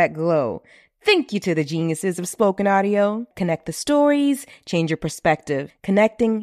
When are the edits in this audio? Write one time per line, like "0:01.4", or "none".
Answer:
none